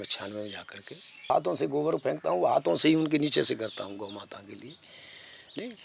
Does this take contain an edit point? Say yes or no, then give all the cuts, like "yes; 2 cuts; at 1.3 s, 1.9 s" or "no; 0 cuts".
yes; 1 cut; at 1.3 s